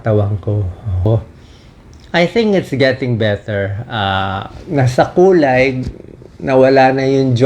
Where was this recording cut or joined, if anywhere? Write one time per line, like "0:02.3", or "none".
0:01.1